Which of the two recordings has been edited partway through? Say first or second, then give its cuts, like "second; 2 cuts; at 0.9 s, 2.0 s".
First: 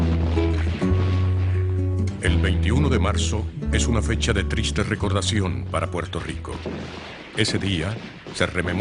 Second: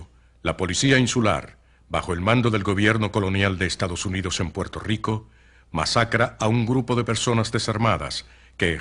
second; 1 cut; at 4.5 s